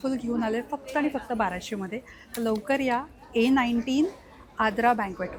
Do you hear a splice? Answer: no; 0 cuts

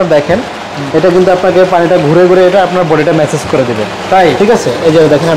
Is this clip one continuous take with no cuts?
yes; 0 cuts

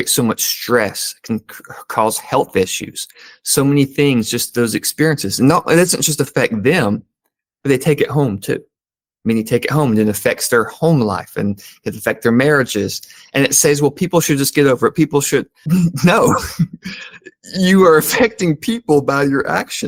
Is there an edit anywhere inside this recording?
no; 0 cuts

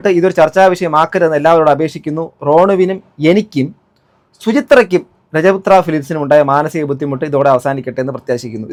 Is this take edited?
no; 0 cuts

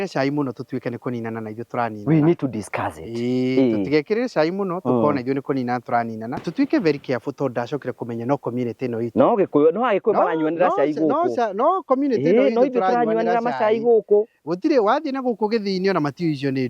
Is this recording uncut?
no; 1 cut; at 6.3 s

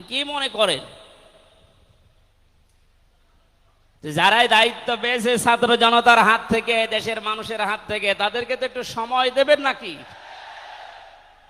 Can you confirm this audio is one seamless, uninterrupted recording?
no; 1 cut; at 10.2 s

